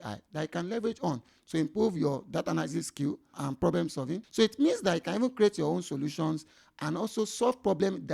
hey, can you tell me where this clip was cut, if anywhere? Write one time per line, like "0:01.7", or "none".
0:03.3
0:04.3